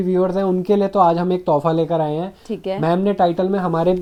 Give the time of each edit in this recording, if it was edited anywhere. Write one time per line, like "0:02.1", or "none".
none